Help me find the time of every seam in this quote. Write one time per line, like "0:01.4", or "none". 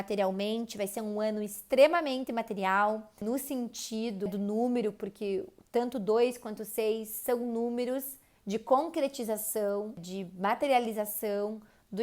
0:03.2
0:04.3
0:10.1